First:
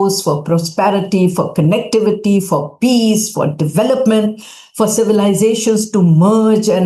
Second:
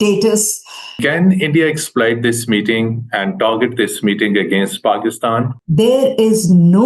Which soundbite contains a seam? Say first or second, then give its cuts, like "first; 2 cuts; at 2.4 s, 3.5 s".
second; 2 cuts; at 1.0 s, 5.5 s